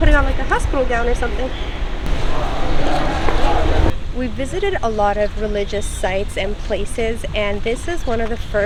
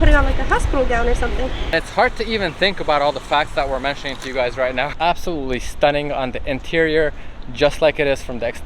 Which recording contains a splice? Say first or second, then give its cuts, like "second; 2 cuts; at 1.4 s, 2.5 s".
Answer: second; 2 cuts; at 1.6 s, 4.9 s